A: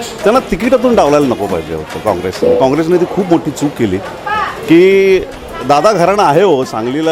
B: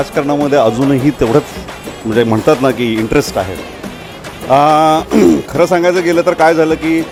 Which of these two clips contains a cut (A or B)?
A